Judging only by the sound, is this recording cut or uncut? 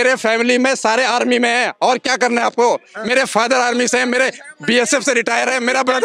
uncut